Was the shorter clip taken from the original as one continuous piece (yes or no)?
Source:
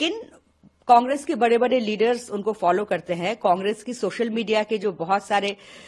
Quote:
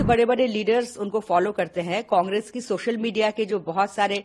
yes